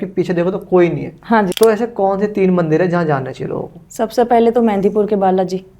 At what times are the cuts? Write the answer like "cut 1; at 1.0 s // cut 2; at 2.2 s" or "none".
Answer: cut 1; at 1.5 s